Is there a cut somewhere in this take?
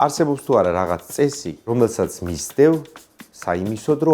yes; 1 cut; at 1.7 s

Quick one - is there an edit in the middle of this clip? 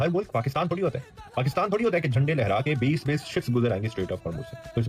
no; 0 cuts

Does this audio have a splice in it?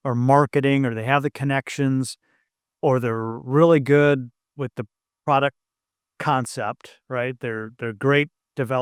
no; 0 cuts

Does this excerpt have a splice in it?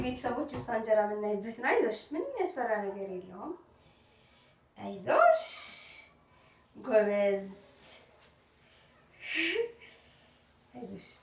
no; 0 cuts

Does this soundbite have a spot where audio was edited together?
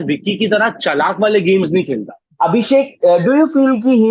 yes; 1 cut; at 2.2 s

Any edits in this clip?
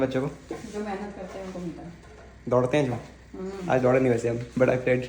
no; 0 cuts

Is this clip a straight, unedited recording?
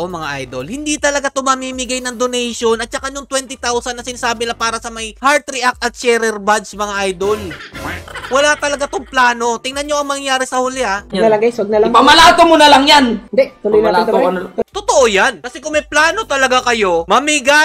yes; 0 cuts

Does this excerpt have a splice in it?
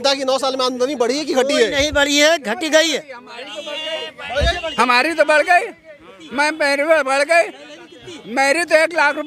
no; 0 cuts

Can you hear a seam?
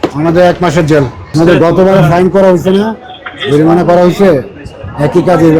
yes; 1 cut; at 1.3 s

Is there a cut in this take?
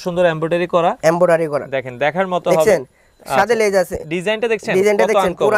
no; 0 cuts

